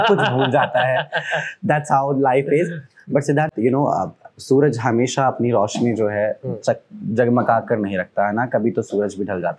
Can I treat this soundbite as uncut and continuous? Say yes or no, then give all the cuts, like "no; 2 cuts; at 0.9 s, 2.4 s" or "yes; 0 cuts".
yes; 0 cuts